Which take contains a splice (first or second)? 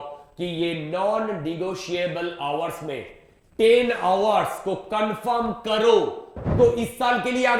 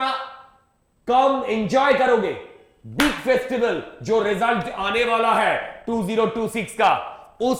first